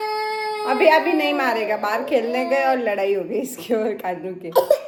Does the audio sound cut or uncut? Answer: uncut